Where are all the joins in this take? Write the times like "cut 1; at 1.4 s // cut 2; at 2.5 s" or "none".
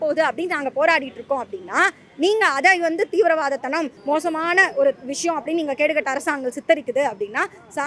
cut 1; at 4.0 s

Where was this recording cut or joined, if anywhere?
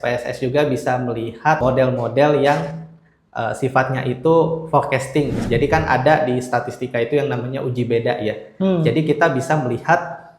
cut 1; at 1.6 s // cut 2; at 5.4 s

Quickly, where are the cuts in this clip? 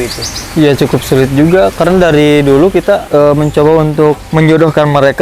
cut 1; at 4.2 s

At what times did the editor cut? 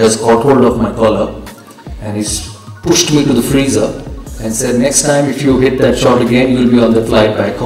none

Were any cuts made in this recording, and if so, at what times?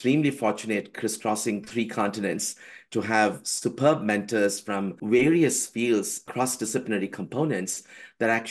cut 1; at 4.9 s // cut 2; at 6.3 s

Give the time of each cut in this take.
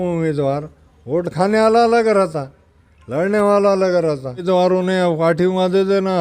cut 1; at 4.4 s

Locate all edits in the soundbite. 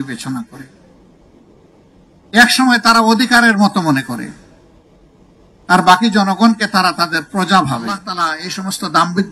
cut 1; at 8.1 s

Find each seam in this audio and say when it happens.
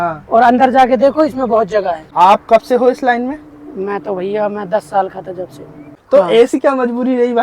cut 1; at 2.1 s // cut 2; at 5.9 s

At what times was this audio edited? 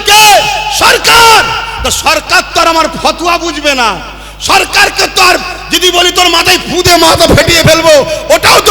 none

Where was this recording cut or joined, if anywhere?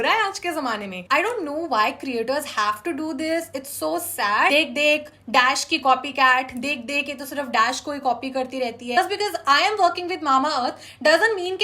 cut 1; at 0.9 s // cut 2; at 4.5 s // cut 3; at 9.0 s

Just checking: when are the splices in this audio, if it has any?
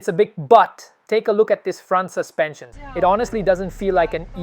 cut 1; at 2.7 s

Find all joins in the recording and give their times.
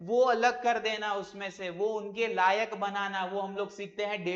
none

